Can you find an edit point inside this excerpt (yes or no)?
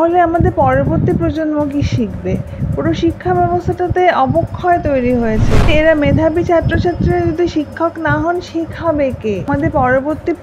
yes